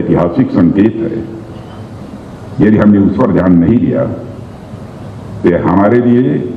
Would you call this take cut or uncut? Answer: uncut